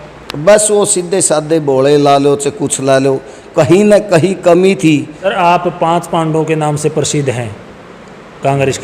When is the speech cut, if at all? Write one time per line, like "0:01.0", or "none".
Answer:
0:05.2